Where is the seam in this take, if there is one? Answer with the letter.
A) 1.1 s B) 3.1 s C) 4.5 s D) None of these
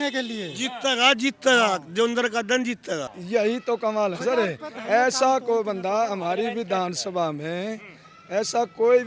B